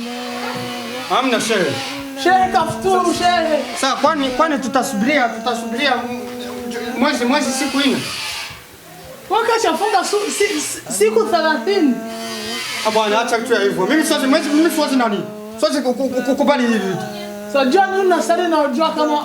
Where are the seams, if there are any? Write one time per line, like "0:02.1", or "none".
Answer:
none